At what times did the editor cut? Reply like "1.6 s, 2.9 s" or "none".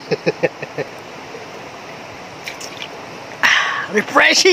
0.9 s